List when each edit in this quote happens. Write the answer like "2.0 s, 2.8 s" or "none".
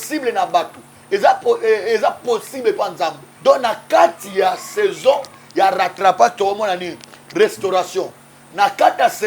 3.2 s